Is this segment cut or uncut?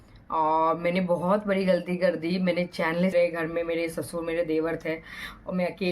cut